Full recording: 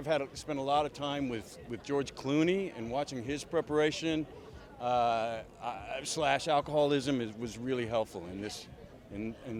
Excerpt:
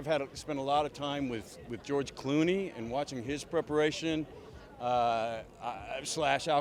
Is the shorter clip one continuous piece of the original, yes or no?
yes